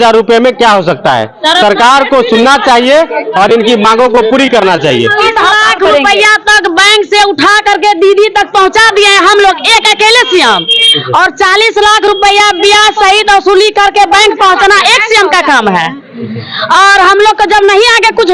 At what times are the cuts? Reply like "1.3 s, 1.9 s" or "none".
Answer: 5.2 s